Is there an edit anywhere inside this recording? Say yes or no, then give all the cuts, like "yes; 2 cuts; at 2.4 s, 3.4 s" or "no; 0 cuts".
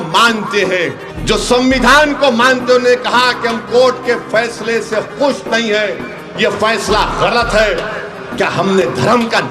yes; 1 cut; at 1.1 s